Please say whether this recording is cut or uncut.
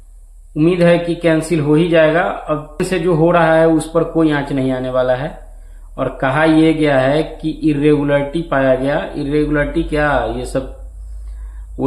cut